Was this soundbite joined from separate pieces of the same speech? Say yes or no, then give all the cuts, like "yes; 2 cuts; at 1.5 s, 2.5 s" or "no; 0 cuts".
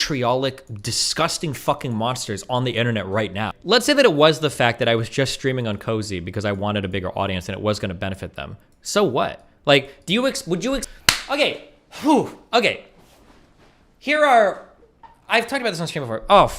yes; 2 cuts; at 3.5 s, 10.8 s